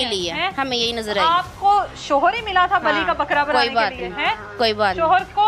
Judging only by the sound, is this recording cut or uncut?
uncut